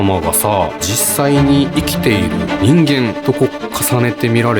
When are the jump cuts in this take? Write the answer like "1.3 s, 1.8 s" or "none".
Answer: 0.9 s, 2.5 s, 3.2 s

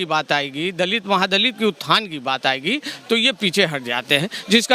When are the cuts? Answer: none

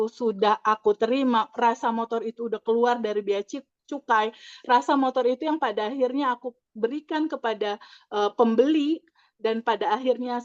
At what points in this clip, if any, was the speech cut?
none

